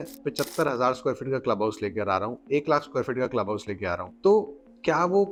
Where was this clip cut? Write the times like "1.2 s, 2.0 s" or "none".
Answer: none